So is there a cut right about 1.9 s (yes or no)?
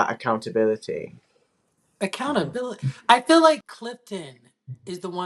no